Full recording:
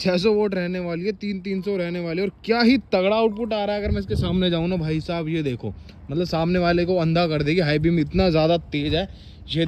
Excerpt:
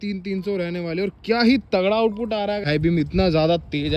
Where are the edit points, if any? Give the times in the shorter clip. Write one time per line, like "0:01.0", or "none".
0:02.7

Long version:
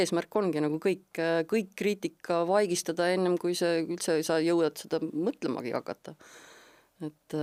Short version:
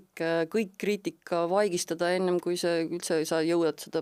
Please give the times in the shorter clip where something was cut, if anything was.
none

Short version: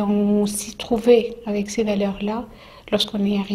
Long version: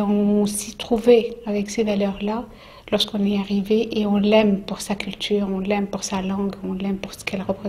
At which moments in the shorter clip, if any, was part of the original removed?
none

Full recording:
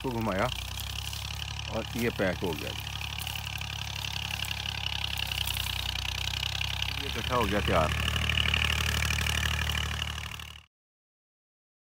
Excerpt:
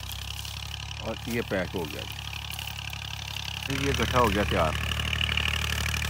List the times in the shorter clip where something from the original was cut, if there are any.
0:03.7

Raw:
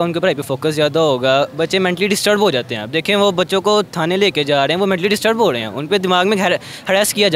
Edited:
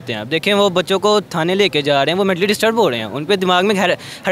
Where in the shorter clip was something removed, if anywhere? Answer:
none

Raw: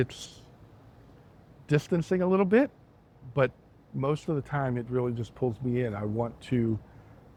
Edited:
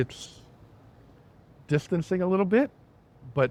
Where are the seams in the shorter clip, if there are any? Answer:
none

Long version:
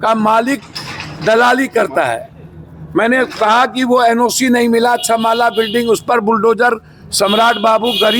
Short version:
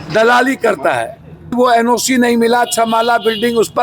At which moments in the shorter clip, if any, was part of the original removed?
0:01.5

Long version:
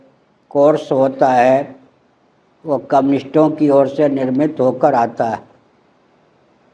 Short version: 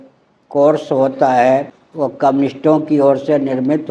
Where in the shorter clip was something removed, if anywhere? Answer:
0:02.3

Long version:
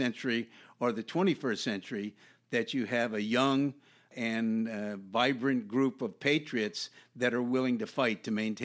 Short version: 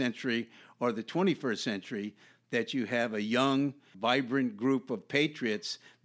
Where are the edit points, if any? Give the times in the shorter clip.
0:03.9

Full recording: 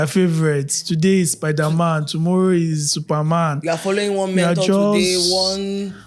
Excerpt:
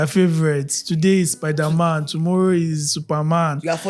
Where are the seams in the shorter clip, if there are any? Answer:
none

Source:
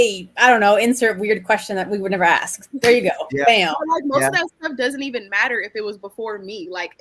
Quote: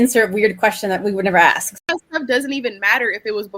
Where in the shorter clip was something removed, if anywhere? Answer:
0:01.9

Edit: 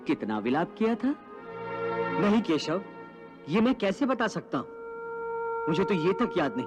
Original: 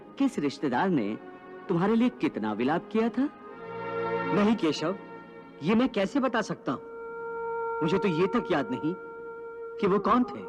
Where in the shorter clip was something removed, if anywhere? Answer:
none

